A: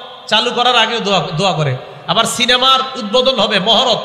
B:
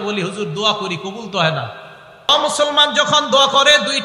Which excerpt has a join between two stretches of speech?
B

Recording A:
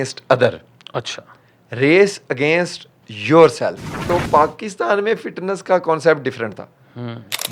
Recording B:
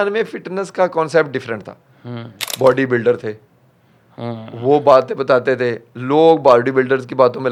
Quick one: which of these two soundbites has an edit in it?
A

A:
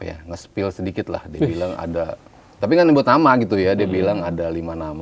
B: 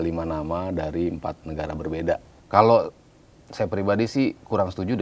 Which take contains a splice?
B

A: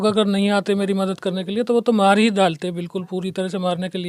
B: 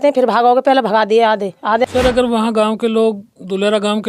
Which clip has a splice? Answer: B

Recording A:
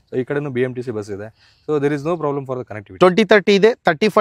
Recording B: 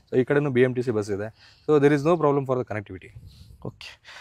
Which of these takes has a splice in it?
A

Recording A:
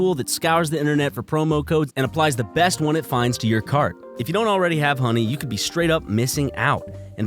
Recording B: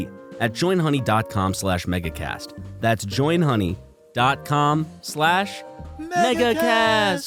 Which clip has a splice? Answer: A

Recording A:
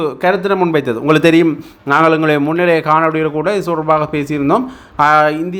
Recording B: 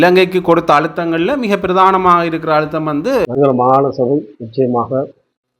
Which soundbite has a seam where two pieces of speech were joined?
B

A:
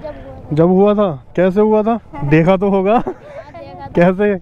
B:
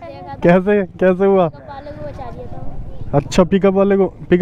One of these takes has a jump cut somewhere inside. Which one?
A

